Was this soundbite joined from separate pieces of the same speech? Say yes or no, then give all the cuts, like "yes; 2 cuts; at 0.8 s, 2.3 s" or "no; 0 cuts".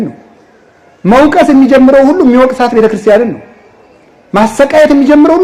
no; 0 cuts